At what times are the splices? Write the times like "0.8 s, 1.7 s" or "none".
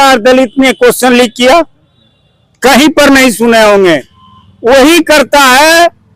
none